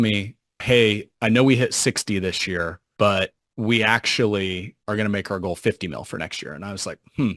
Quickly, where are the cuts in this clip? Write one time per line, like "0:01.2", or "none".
0:00.8
0:02.8
0:03.4
0:04.7